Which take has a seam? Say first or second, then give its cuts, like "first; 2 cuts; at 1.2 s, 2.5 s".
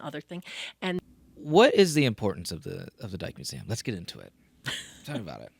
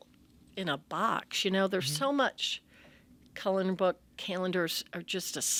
first; 1 cut; at 1.0 s